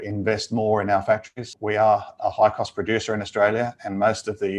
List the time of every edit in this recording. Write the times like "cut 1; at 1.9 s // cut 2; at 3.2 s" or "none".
cut 1; at 1.4 s